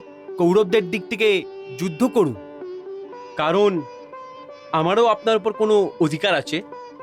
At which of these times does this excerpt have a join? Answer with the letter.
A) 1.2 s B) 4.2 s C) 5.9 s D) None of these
D